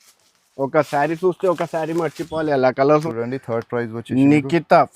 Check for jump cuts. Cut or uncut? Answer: cut